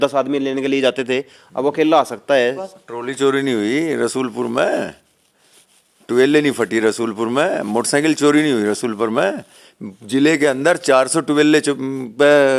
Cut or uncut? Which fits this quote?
cut